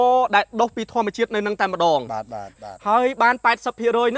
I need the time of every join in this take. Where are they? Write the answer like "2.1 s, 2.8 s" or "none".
2.5 s